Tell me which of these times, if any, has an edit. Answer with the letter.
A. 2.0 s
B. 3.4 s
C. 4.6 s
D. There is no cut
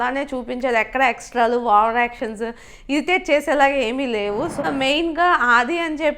C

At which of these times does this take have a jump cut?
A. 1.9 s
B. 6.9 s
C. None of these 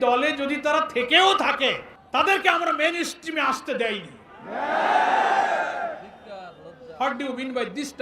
A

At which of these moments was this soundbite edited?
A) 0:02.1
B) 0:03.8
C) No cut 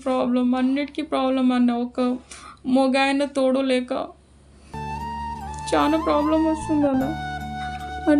C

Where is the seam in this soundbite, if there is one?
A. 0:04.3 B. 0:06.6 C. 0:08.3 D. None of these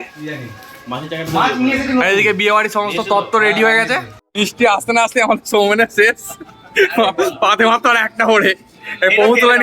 A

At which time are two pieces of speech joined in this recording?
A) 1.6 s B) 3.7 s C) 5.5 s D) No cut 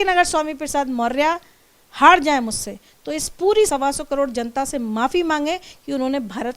B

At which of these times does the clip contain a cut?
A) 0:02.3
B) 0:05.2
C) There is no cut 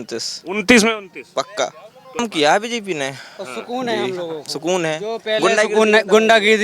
A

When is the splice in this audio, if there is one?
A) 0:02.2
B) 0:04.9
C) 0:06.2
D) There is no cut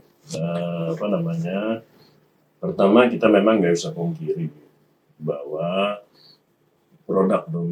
D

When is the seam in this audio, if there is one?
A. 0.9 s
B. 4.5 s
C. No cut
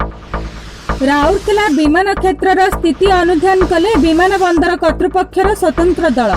A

